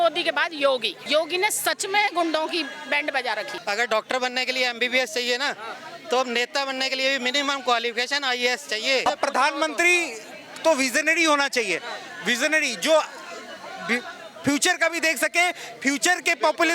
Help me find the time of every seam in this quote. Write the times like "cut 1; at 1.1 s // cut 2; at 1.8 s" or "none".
cut 1; at 0.9 s // cut 2; at 3.5 s // cut 3; at 9.0 s

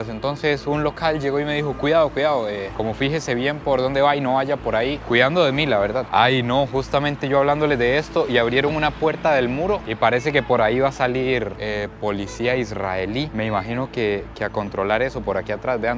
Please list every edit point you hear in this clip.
none

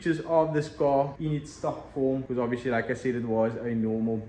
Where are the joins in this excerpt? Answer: cut 1; at 1.1 s // cut 2; at 2.3 s

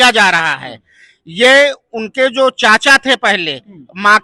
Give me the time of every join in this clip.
none

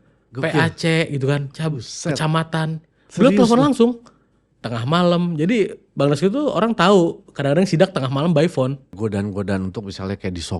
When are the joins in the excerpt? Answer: cut 1; at 9.0 s

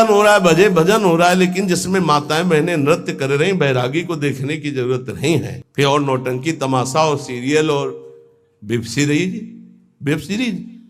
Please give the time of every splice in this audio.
none

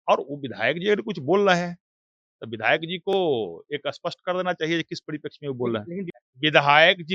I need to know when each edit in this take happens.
cut 1; at 6.1 s

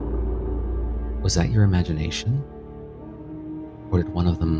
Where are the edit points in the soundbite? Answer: cut 1; at 1.2 s

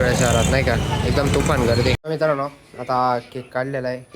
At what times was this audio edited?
cut 1; at 2.0 s

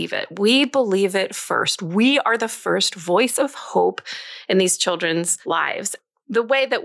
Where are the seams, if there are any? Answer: cut 1; at 5.6 s

